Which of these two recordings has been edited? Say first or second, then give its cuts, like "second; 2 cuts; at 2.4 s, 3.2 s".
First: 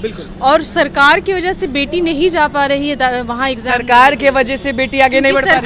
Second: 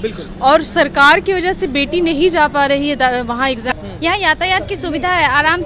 second; 1 cut; at 3.7 s